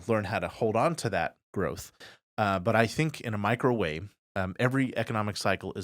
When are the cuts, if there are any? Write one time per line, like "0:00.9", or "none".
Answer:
none